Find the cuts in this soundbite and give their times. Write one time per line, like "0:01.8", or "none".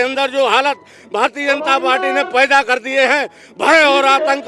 none